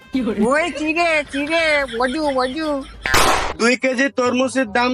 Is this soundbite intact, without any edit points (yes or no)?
no